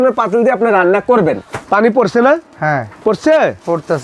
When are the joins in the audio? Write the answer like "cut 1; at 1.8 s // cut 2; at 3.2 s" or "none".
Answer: cut 1; at 1.5 s